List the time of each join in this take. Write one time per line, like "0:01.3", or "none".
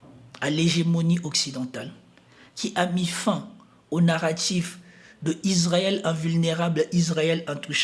none